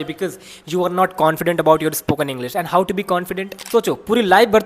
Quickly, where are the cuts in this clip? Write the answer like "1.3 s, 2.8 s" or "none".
3.6 s